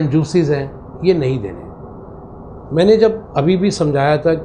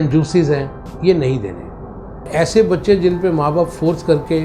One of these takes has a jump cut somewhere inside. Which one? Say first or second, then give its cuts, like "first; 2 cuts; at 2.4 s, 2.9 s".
second; 1 cut; at 2.3 s